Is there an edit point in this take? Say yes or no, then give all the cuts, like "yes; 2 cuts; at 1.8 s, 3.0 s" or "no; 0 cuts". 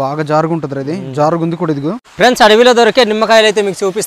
yes; 1 cut; at 2.0 s